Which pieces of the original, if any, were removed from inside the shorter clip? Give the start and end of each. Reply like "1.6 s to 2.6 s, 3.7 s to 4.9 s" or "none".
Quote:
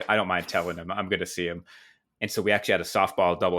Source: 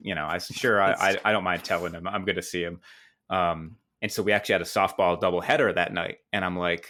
3.1 s to 3.7 s